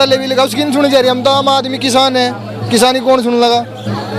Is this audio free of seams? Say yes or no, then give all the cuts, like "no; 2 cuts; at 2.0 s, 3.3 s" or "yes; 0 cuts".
yes; 0 cuts